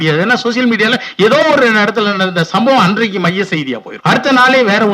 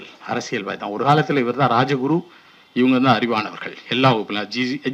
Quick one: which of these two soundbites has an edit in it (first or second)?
first